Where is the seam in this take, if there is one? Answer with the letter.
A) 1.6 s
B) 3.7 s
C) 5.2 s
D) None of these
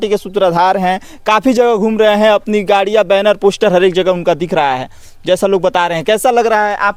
D